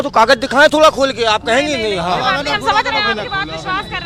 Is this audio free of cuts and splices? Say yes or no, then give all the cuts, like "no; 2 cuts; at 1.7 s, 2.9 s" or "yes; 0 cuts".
yes; 0 cuts